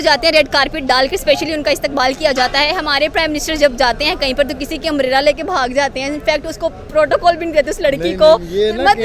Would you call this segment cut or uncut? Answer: uncut